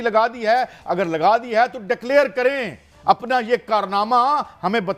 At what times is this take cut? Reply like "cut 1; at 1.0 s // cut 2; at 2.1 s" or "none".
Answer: none